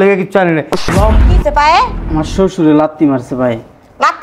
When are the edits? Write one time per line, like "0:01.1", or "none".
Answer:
0:01.2